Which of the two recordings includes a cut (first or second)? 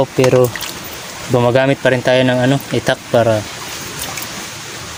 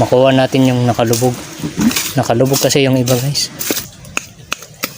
second